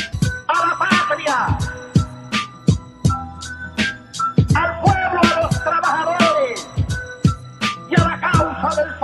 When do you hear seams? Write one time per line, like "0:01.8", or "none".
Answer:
0:04.8